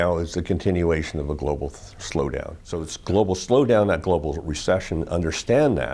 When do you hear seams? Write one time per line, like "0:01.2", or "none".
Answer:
0:02.9